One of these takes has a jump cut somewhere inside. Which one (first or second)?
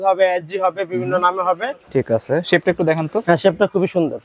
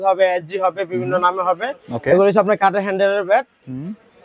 first